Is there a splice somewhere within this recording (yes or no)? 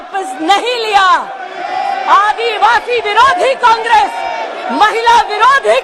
no